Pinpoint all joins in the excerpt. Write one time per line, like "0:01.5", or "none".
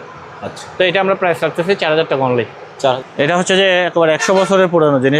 0:03.0